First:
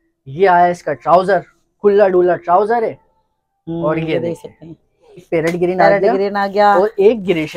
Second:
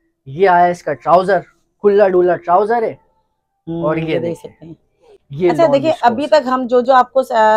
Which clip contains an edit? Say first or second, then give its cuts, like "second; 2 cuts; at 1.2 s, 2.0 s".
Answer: first; 1 cut; at 5.3 s